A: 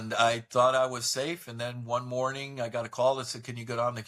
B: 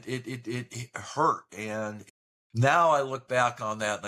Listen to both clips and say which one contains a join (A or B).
B